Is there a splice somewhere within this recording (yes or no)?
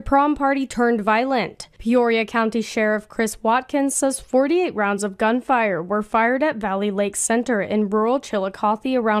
no